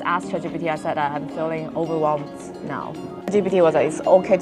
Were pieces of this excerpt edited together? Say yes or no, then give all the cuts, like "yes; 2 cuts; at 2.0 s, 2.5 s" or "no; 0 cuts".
yes; 1 cut; at 3.2 s